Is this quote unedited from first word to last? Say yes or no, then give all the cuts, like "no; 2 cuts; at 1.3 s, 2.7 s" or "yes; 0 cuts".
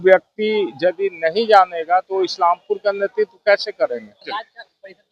no; 1 cut; at 4.1 s